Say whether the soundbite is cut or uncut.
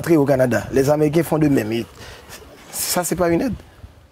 uncut